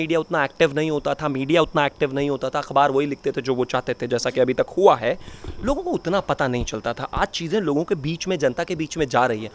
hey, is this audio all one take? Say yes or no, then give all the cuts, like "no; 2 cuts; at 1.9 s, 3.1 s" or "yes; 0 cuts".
yes; 0 cuts